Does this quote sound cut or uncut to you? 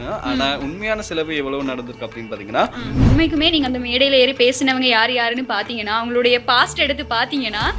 cut